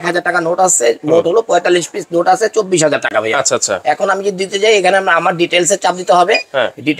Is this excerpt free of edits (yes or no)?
yes